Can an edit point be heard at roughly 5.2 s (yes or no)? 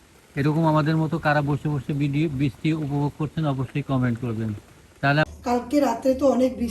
yes